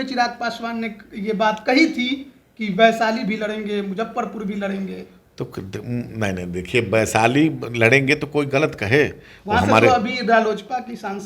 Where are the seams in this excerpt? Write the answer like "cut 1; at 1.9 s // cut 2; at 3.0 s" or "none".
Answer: none